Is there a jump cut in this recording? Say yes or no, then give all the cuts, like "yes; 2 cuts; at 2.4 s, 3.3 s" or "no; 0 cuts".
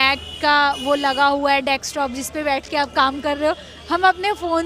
no; 0 cuts